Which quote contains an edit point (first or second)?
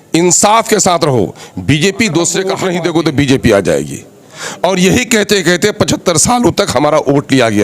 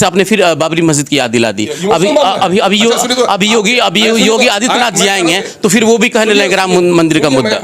first